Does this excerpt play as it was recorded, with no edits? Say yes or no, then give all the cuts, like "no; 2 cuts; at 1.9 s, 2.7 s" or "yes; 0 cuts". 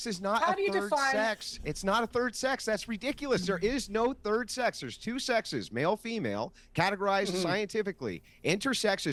yes; 0 cuts